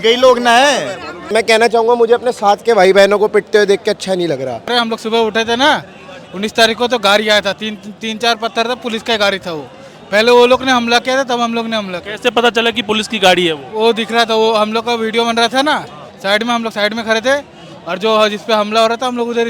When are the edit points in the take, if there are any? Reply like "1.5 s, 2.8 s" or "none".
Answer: 1.2 s, 4.7 s